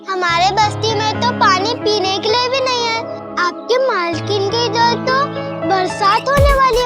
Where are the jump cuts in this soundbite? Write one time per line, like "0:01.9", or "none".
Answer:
none